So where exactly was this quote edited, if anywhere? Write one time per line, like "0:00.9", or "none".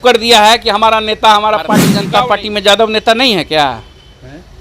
0:02.0